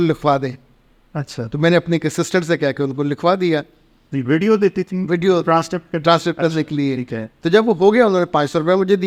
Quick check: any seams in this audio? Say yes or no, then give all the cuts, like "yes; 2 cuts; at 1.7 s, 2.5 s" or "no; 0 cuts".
no; 0 cuts